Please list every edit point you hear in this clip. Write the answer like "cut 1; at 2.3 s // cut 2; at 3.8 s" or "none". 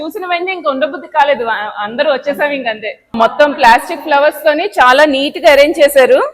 cut 1; at 3.2 s

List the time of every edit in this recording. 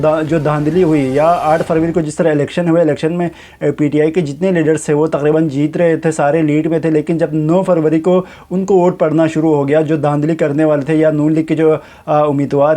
none

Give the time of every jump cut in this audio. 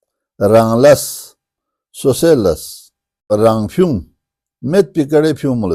cut 1; at 3.3 s

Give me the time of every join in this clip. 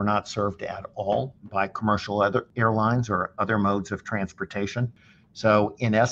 cut 1; at 1.4 s // cut 2; at 2.5 s // cut 3; at 4.9 s

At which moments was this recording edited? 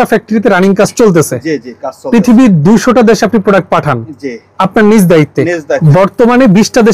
cut 1; at 5.8 s

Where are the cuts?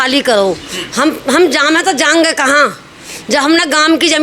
none

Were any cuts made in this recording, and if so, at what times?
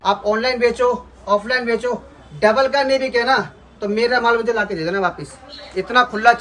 none

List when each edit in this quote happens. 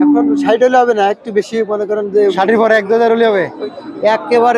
cut 1; at 3.6 s

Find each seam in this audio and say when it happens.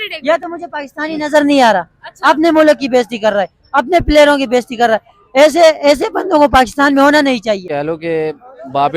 cut 1; at 7.6 s

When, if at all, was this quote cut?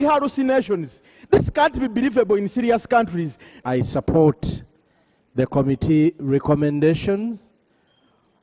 cut 1; at 3.5 s

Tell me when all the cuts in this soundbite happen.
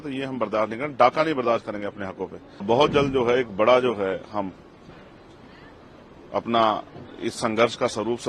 cut 1; at 2.6 s

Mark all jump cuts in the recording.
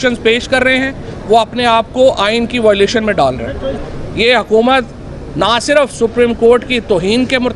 cut 1; at 3.8 s

